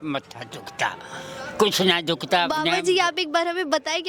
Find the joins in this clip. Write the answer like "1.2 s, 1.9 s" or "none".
2.7 s